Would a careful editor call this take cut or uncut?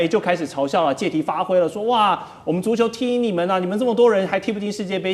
uncut